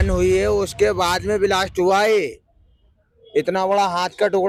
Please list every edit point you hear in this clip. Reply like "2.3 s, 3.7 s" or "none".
none